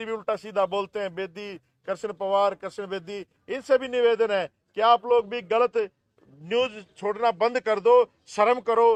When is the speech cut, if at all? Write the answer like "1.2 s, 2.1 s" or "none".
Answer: none